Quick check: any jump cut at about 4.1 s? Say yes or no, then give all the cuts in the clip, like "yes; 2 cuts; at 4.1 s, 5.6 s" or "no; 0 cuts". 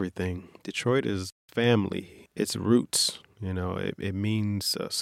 no; 2 cuts; at 1.3 s, 2.2 s